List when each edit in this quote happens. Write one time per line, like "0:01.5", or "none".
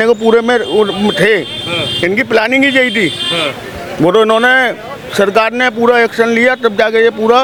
none